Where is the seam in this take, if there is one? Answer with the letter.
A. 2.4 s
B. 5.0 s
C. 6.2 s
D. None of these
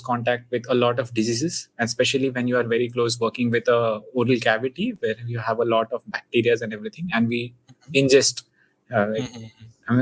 D